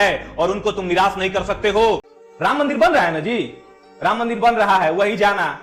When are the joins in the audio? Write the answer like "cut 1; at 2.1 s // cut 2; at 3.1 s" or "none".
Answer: cut 1; at 2.1 s